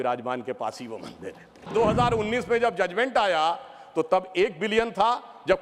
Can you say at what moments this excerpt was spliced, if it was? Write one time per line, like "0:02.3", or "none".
0:01.7